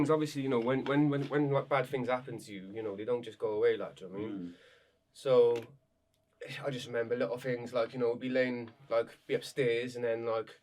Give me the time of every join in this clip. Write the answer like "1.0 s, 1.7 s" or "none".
none